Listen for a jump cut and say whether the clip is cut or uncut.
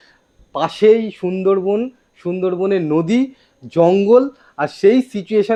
uncut